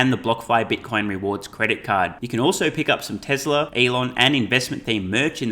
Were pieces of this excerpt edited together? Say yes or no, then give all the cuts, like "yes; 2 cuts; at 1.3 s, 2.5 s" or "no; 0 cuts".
yes; 1 cut; at 3.7 s